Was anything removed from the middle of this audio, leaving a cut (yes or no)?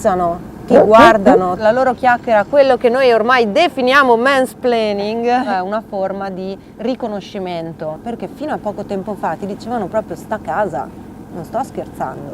yes